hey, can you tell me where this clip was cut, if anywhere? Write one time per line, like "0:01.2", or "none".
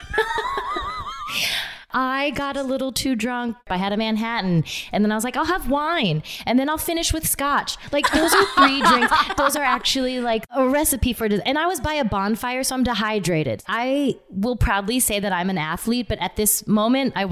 0:01.9
0:03.6
0:10.6
0:13.6